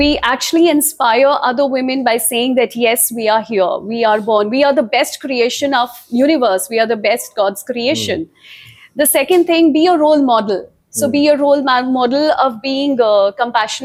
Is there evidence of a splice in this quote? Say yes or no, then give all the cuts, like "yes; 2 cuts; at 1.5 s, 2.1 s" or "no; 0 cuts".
no; 0 cuts